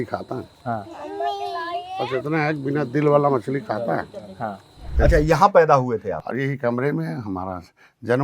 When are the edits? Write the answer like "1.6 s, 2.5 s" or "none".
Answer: 4.9 s, 6.2 s